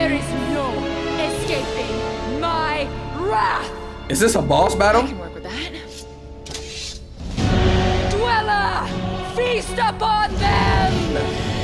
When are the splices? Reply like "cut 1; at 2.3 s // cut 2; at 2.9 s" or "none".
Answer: none